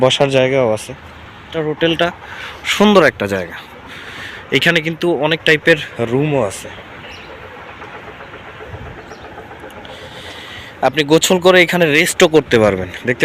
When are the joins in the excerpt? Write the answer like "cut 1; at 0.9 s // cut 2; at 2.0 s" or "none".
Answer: cut 1; at 1.5 s